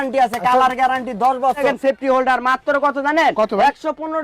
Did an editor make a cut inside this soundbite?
yes; 1 cut; at 1.6 s

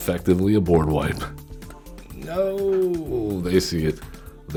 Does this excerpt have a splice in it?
no; 0 cuts

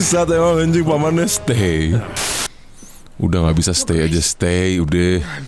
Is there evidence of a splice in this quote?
yes; 1 cut; at 2.2 s

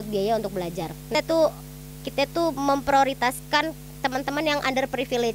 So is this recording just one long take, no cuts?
no; 1 cut; at 1.1 s

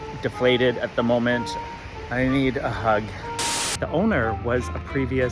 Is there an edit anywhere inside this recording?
yes; 2 cuts; at 1.5 s, 3.5 s

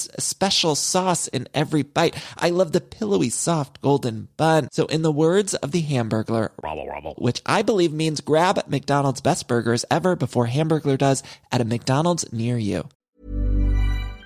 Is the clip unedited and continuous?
no; 1 cut; at 13.0 s

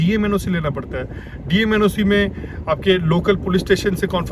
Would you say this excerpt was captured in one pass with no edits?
yes; 0 cuts

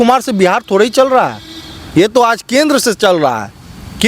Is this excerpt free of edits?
yes; 0 cuts

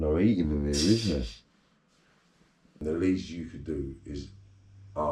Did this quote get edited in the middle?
yes; 1 cut; at 2.8 s

